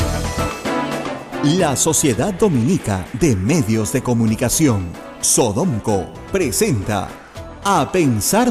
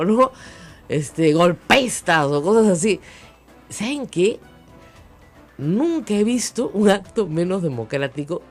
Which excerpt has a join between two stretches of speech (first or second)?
first